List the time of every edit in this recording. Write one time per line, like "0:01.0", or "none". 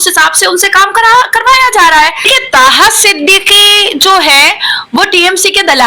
0:02.2